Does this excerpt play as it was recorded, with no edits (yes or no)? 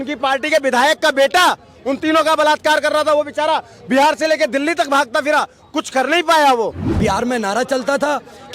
no